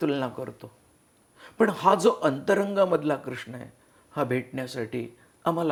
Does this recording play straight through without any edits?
yes; 0 cuts

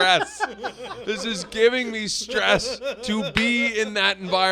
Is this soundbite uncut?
yes; 0 cuts

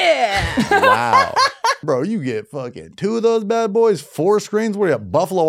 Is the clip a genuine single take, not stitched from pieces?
no; 1 cut; at 1.8 s

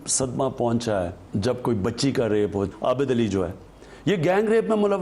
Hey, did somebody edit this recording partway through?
yes; 1 cut; at 2.7 s

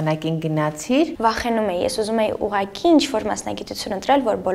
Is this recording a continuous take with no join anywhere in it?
no; 1 cut; at 1.1 s

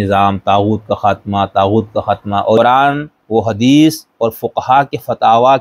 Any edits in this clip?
yes; 1 cut; at 2.6 s

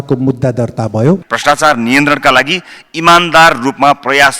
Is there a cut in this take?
yes; 1 cut; at 1.3 s

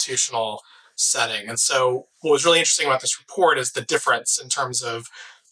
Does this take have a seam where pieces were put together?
no; 0 cuts

